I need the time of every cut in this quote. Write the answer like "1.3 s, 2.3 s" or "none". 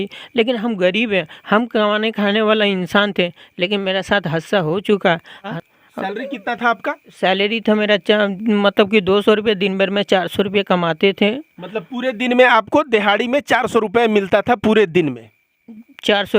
5.6 s